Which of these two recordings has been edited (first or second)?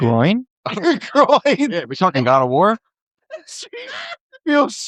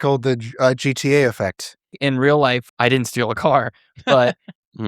second